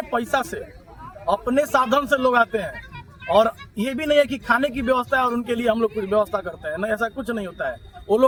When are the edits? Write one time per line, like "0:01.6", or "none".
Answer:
none